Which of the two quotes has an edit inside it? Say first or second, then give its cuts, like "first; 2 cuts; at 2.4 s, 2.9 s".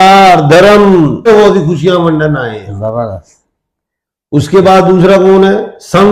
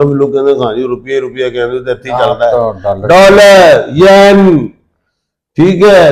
first; 1 cut; at 1.3 s